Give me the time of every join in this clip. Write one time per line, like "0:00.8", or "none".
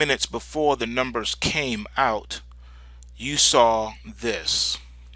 0:02.8